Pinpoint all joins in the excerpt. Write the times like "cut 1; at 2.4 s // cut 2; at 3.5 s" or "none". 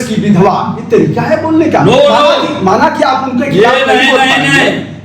none

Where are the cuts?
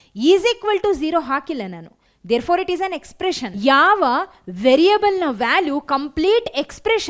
cut 1; at 3.5 s

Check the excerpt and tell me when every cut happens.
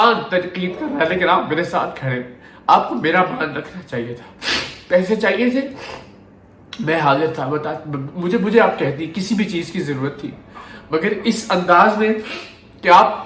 none

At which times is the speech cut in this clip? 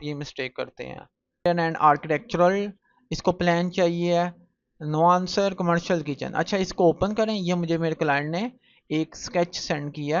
cut 1; at 1.4 s

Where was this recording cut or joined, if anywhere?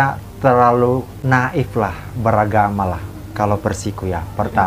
cut 1; at 1.1 s

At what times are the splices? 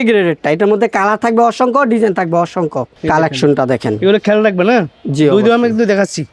none

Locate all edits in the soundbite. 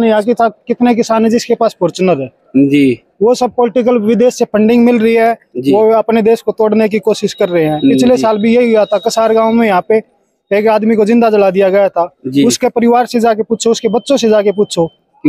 none

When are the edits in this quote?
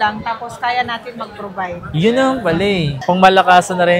cut 1; at 3.0 s

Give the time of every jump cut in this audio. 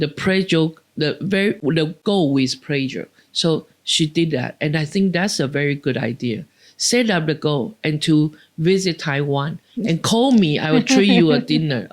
none

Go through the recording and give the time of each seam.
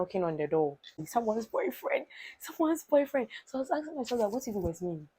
cut 1; at 1.1 s

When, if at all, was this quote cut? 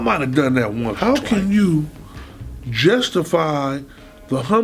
cut 1; at 0.9 s

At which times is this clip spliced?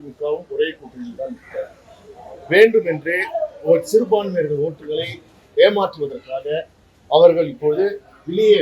none

